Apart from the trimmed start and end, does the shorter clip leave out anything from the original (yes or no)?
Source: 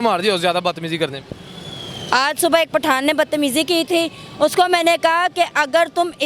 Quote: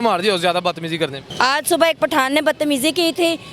yes